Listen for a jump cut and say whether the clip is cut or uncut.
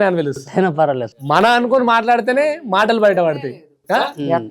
uncut